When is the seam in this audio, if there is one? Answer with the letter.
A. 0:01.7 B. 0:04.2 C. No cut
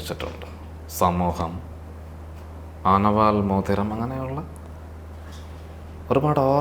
C